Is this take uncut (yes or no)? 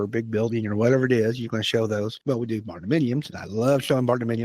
no